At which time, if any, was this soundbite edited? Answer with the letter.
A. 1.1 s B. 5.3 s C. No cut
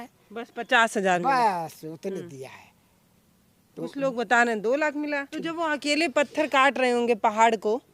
B